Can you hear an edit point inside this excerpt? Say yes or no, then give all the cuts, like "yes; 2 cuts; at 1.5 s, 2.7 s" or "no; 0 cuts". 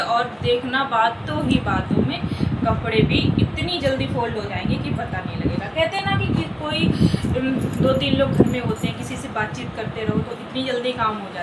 no; 0 cuts